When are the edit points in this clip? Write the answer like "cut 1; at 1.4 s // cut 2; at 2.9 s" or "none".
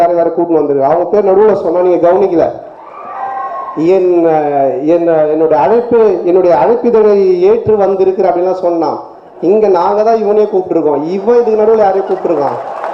none